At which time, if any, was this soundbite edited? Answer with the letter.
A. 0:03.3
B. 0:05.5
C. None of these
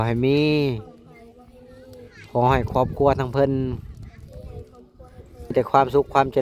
B